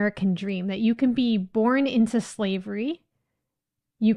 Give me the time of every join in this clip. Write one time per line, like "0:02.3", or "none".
none